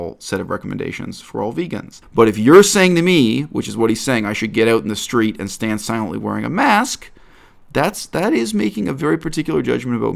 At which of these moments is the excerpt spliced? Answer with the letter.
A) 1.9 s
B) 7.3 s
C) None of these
A